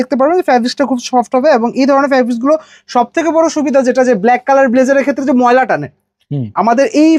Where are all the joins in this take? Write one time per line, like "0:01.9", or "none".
none